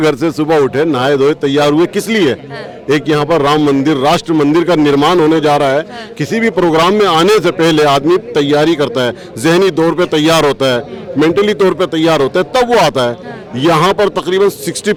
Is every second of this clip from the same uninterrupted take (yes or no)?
yes